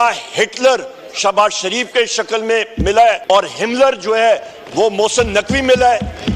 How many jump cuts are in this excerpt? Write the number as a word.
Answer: one